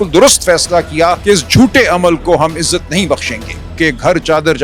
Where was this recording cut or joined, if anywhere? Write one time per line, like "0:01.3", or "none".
0:01.2
0:03.7